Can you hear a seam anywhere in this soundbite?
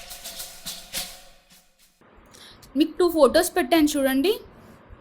yes; 1 cut; at 1.6 s

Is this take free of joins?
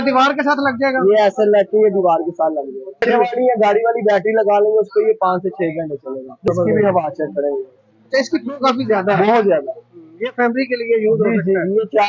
no; 2 cuts; at 3.0 s, 6.4 s

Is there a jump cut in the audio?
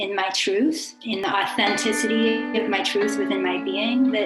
yes; 1 cut; at 1.0 s

